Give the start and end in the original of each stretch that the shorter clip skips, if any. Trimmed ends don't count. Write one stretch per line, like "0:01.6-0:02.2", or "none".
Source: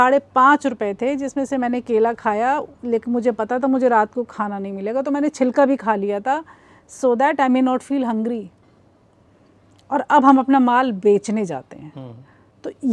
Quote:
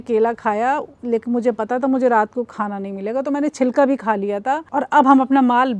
0:06.4-0:09.8